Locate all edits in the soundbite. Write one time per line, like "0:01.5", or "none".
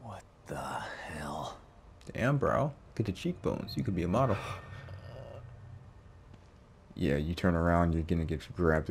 none